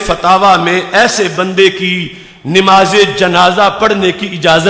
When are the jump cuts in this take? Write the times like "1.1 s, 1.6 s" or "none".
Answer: none